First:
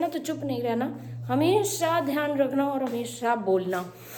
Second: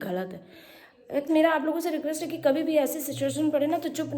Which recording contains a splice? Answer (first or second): second